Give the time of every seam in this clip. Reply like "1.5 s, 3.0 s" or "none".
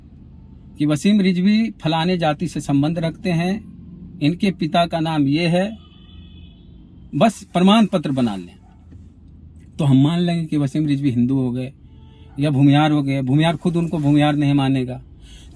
none